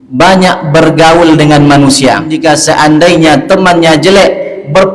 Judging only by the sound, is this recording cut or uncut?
cut